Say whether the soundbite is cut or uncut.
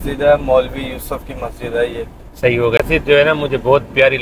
cut